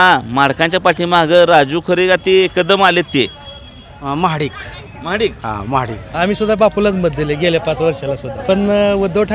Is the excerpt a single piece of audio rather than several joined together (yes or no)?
no